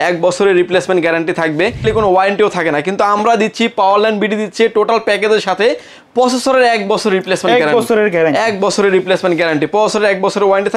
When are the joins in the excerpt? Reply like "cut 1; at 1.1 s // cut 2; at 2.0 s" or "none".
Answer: cut 1; at 1.8 s